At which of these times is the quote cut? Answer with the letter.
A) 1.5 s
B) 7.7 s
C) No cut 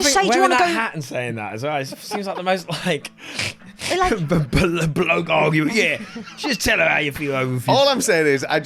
C